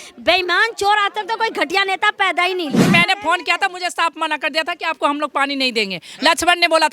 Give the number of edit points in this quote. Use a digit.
1